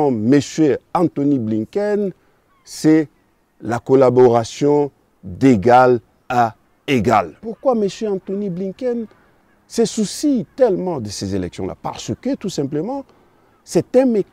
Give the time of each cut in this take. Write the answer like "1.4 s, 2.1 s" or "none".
7.4 s